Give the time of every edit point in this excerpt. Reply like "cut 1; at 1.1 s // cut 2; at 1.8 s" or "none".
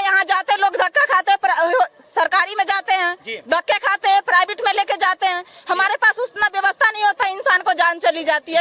none